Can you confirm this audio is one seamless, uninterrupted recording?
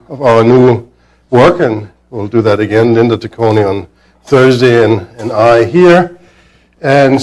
no; 1 cut; at 6.0 s

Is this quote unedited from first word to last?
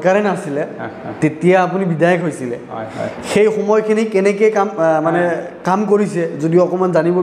yes; 0 cuts

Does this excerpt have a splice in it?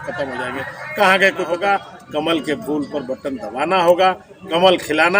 yes; 1 cut; at 1.6 s

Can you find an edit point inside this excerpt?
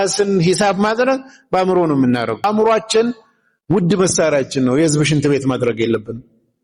yes; 1 cut; at 2.4 s

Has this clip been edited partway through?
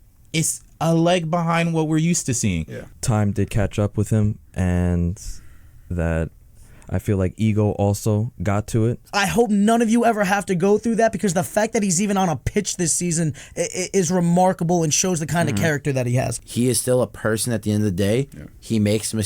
yes; 3 cuts; at 2.8 s, 9.0 s, 16.4 s

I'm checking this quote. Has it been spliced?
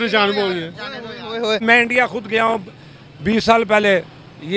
yes; 1 cut; at 1.6 s

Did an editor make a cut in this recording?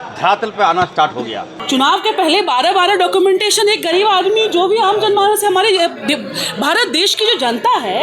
yes; 1 cut; at 1.5 s

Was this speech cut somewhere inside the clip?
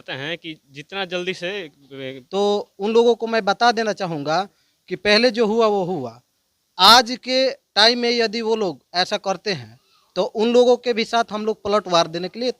yes; 1 cut; at 2.2 s

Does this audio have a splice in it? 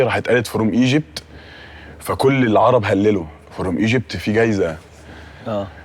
no; 0 cuts

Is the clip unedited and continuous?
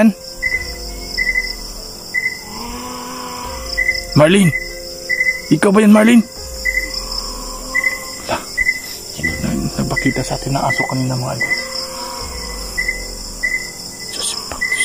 yes; 0 cuts

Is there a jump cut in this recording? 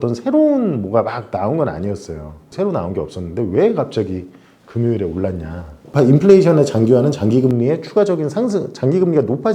yes; 2 cuts; at 2.5 s, 5.8 s

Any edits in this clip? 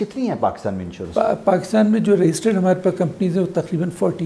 no; 0 cuts

